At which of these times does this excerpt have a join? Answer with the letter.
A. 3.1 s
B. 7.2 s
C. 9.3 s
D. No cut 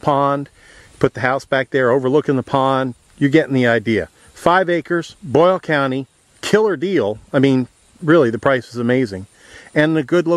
C